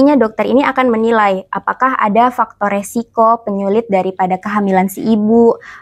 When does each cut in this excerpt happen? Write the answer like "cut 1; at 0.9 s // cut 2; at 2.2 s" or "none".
none

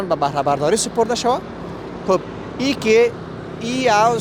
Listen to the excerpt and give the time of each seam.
none

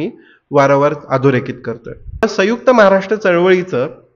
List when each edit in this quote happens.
cut 1; at 2.2 s

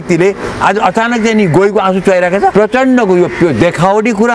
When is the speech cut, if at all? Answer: cut 1; at 2.5 s

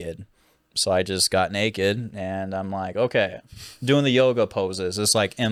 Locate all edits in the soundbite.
none

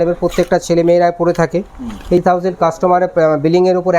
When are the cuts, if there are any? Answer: cut 1; at 2.2 s

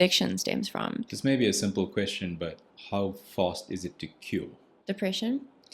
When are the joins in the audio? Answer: cut 1; at 1.1 s // cut 2; at 2.7 s // cut 3; at 4.7 s

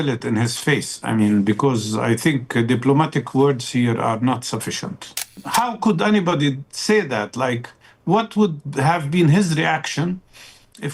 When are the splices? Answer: cut 1; at 5.4 s

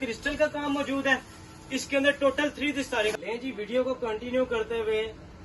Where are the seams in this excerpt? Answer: cut 1; at 3.1 s

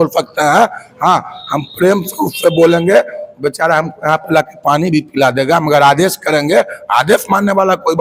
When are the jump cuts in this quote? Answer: none

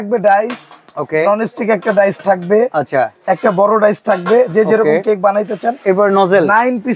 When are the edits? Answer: none

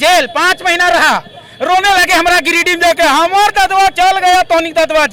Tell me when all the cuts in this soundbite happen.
none

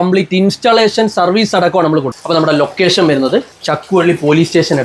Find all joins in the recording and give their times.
cut 1; at 2.1 s // cut 2; at 3.6 s

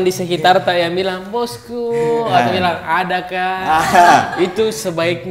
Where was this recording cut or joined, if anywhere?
none

